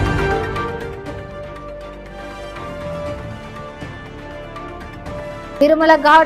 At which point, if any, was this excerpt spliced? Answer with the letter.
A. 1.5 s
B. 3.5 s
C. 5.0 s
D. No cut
B